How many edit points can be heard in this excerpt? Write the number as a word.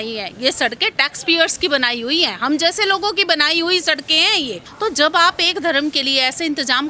one